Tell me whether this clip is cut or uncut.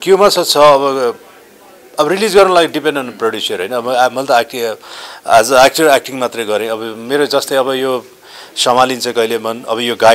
uncut